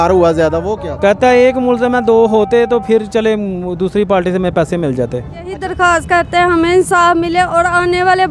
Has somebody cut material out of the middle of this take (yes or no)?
yes